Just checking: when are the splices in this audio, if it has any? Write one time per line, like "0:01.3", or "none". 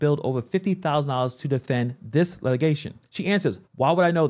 0:03.4